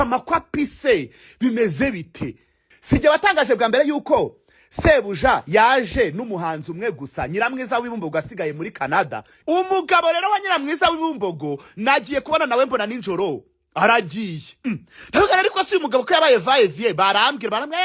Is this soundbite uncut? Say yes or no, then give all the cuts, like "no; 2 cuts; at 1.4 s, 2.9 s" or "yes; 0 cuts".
no; 2 cuts; at 2.7 s, 9.3 s